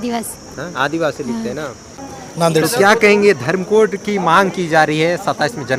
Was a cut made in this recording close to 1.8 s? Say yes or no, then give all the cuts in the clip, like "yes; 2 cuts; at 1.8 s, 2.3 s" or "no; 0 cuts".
yes; 1 cut; at 1.8 s